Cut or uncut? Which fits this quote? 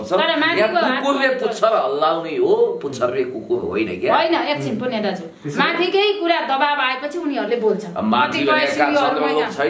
uncut